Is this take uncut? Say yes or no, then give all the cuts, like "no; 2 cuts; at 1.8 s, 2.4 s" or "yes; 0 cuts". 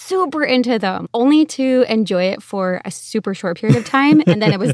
no; 1 cut; at 1.0 s